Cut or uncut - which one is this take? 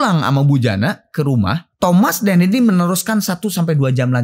cut